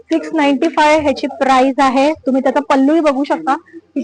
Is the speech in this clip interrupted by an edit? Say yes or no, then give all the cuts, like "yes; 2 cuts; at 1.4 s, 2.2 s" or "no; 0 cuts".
no; 0 cuts